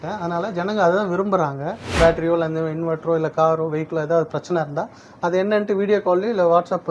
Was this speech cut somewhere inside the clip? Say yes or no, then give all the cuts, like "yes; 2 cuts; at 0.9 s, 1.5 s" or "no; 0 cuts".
yes; 1 cut; at 1.9 s